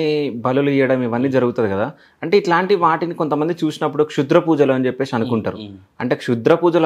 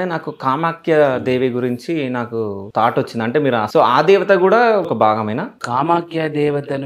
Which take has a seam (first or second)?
second